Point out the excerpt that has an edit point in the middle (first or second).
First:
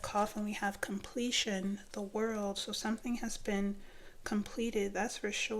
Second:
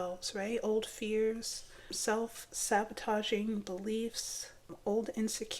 second